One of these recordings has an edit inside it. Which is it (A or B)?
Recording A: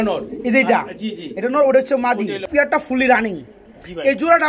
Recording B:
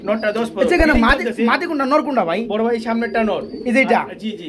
A